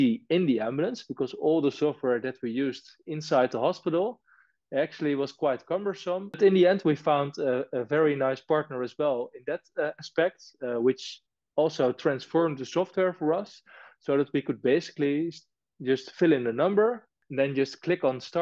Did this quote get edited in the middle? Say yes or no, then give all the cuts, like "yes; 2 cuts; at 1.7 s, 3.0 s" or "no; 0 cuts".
yes; 2 cuts; at 6.4 s, 17.1 s